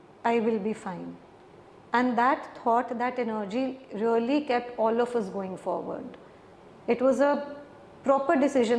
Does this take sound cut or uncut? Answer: uncut